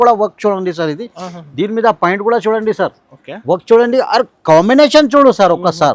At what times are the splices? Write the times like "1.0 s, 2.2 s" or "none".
none